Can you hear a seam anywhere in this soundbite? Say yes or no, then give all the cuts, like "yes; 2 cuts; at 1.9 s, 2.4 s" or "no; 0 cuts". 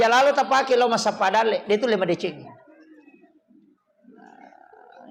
no; 0 cuts